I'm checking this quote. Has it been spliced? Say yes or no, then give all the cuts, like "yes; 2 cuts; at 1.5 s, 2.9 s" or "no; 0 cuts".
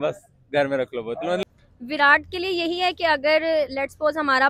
no; 0 cuts